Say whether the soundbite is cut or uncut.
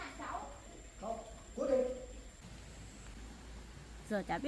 cut